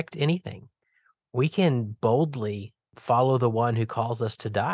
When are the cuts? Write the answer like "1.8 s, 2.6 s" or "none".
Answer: 2.9 s